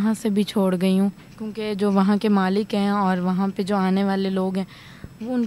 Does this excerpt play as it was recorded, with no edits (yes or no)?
yes